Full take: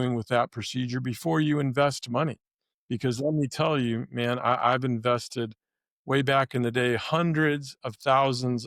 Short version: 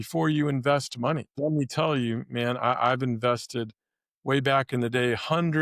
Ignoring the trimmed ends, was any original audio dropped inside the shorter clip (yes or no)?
yes